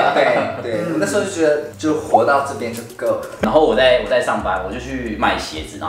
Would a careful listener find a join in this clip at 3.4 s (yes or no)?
yes